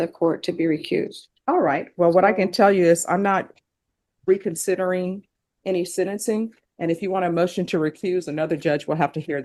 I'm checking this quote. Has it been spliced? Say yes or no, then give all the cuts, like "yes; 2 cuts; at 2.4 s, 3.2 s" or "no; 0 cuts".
no; 0 cuts